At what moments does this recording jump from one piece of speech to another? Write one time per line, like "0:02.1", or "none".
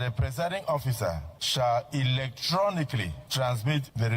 0:03.2

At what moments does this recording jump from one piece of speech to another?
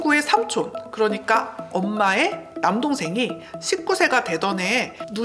none

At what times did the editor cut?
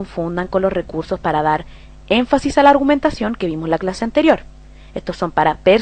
0:02.3

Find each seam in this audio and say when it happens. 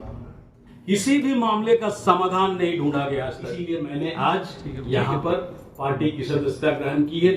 0:03.5

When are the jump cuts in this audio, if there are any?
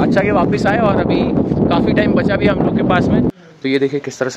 0:03.3

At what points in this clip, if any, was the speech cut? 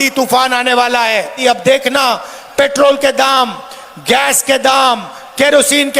0:01.4

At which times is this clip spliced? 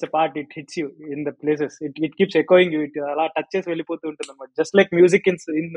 none

